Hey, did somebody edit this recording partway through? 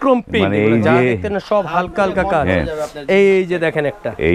no; 0 cuts

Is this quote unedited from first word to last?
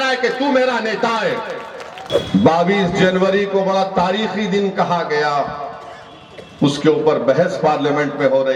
no; 1 cut; at 2.1 s

